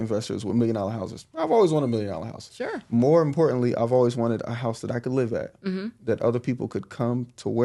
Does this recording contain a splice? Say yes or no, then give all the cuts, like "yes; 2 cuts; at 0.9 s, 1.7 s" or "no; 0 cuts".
no; 0 cuts